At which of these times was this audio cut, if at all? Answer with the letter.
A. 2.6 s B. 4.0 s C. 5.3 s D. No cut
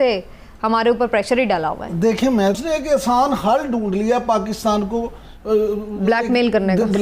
A